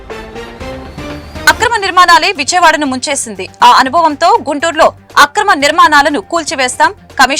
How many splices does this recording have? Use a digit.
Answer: 1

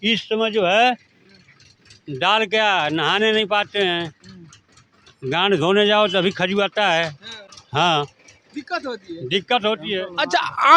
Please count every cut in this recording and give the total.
0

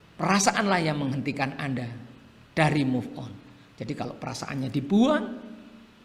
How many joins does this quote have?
0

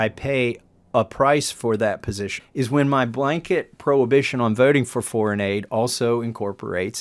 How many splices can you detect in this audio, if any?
1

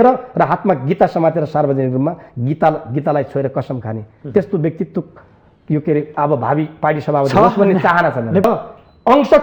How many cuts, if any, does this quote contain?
1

